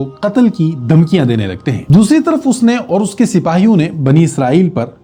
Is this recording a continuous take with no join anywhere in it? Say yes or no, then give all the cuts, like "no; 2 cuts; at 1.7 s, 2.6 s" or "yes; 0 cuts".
yes; 0 cuts